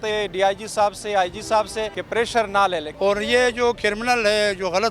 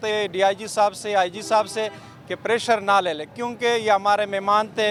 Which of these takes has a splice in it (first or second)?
first